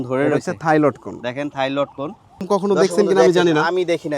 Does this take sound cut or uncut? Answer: cut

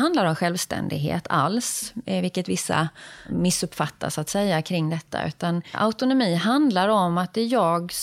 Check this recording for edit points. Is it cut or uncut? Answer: cut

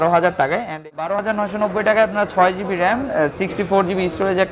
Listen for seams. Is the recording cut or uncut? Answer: cut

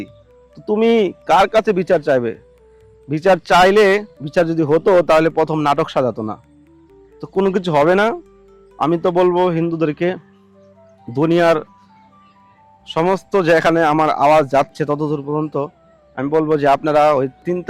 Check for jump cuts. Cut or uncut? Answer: uncut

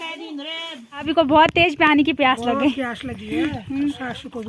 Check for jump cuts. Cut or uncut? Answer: cut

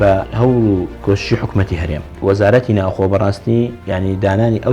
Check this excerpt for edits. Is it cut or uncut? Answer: cut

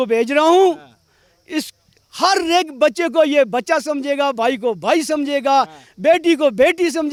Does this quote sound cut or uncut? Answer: uncut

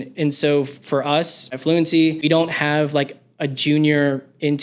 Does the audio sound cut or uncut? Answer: cut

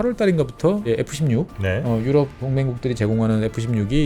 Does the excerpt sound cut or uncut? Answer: cut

